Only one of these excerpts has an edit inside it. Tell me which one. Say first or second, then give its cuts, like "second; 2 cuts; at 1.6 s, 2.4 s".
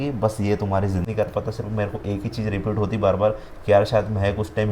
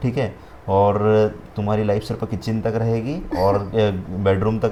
first; 1 cut; at 1.0 s